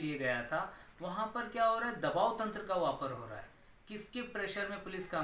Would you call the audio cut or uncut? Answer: uncut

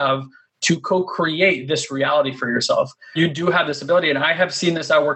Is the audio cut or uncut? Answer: cut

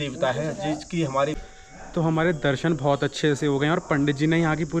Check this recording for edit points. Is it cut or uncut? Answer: cut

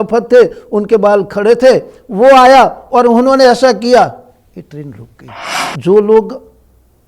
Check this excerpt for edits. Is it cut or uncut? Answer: cut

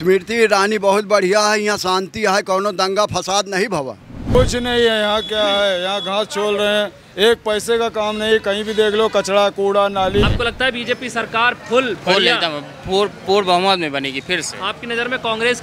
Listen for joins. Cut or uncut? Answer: cut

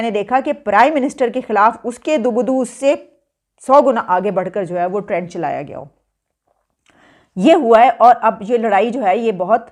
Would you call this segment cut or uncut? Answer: uncut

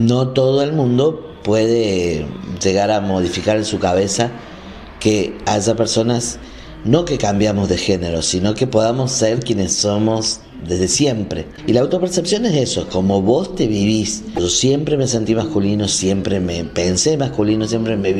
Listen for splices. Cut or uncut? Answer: cut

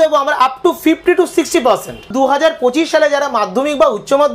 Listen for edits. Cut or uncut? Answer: cut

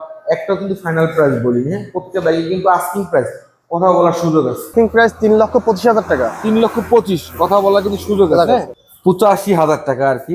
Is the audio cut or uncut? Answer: cut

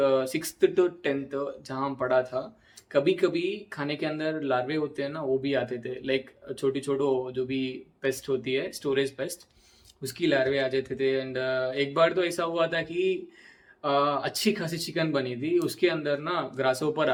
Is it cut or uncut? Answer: uncut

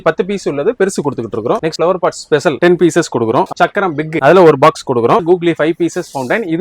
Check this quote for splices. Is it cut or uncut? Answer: cut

